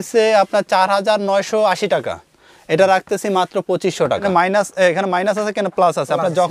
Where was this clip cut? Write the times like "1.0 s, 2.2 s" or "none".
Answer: 4.2 s